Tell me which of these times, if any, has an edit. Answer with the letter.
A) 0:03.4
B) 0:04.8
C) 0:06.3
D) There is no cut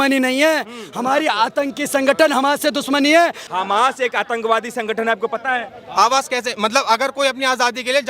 A